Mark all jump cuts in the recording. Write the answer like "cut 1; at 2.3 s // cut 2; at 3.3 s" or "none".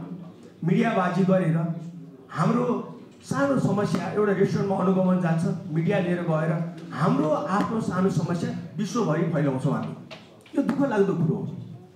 none